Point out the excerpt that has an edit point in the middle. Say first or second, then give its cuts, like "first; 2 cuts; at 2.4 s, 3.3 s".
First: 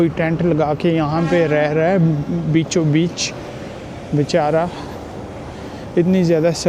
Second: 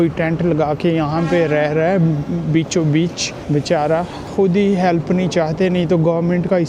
second; 2 cuts; at 3.3 s, 4.2 s